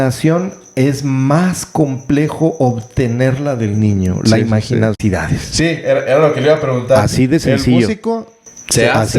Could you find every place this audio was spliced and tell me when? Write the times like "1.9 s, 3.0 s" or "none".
5.0 s